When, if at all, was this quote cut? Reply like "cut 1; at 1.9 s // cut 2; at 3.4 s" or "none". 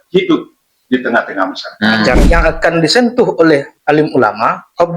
cut 1; at 2.2 s